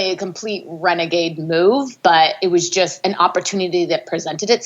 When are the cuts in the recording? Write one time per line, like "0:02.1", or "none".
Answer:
0:02.7